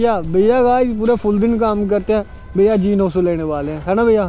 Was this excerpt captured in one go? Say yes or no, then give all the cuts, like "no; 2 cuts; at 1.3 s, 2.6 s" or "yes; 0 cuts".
yes; 0 cuts